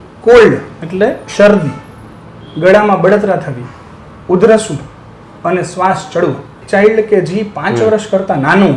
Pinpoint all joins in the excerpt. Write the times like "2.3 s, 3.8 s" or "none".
6.6 s